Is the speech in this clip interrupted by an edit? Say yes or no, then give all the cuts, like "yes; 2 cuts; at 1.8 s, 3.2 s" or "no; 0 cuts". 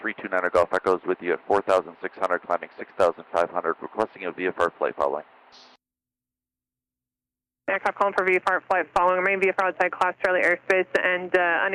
no; 0 cuts